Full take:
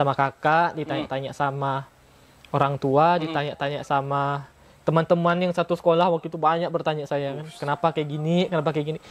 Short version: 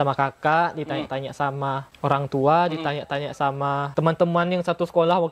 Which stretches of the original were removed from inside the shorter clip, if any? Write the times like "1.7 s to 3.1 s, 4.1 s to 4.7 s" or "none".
1.9 s to 2.4 s, 4.4 s to 4.8 s